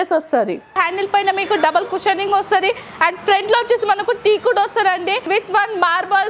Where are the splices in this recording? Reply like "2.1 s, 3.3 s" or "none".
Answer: 0.8 s, 5.2 s